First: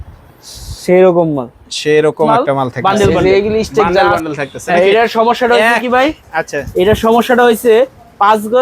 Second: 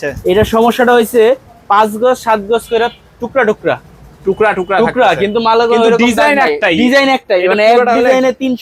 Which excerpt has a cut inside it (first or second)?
first